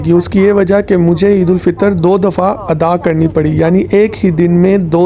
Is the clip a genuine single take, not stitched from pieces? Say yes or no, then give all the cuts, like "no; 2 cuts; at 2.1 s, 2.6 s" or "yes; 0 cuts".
yes; 0 cuts